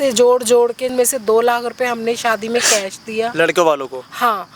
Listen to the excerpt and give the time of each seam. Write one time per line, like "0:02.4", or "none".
0:00.9